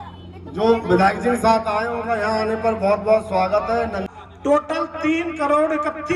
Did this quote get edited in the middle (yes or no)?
yes